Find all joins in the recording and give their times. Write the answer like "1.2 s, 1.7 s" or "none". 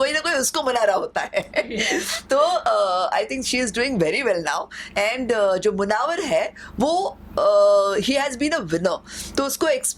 none